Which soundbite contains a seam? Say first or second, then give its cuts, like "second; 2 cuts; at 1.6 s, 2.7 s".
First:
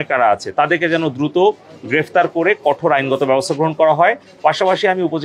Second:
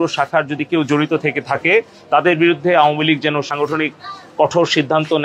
second; 1 cut; at 3.4 s